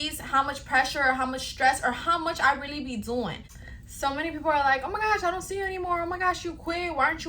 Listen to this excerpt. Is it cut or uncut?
cut